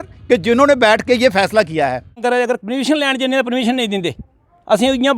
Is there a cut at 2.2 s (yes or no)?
yes